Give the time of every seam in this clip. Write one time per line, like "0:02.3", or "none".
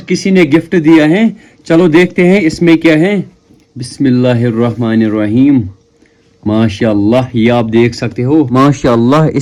none